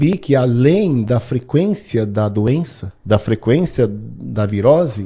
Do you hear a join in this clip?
no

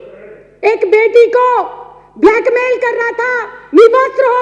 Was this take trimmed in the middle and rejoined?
no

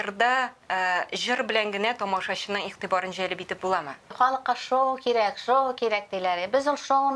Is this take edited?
yes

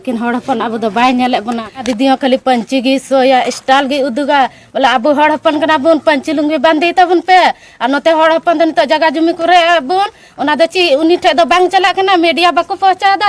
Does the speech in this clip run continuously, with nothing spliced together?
no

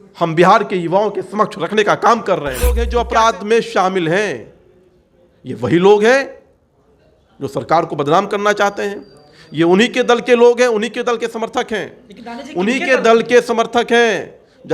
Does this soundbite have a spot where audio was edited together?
yes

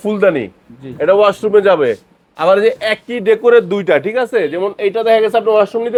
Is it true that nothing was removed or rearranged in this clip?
yes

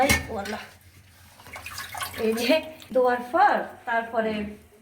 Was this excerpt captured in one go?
no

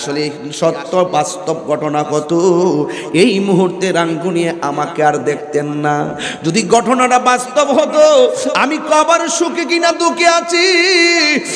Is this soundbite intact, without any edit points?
yes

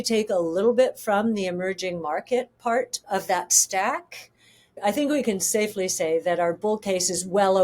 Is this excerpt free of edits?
no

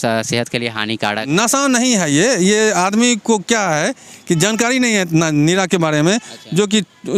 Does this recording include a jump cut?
no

